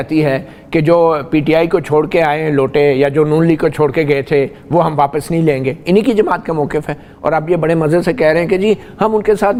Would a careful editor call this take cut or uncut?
uncut